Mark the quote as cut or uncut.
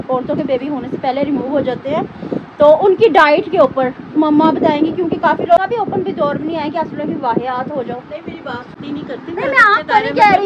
cut